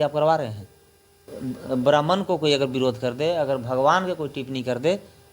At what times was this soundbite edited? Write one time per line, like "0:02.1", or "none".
0:01.3